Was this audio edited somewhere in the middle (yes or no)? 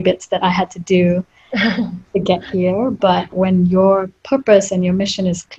yes